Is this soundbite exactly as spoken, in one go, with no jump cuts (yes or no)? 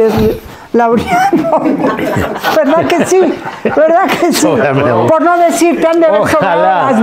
yes